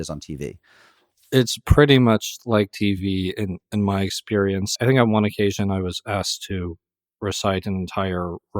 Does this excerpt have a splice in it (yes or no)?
yes